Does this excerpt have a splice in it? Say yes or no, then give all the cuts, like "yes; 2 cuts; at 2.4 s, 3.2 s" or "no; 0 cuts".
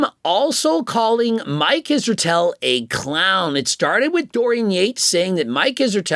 no; 0 cuts